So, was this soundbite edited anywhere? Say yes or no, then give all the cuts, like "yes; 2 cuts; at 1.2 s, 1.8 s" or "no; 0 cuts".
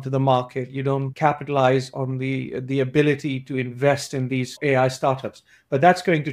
yes; 2 cuts; at 1.1 s, 4.5 s